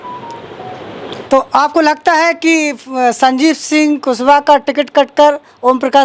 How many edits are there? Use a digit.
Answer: 1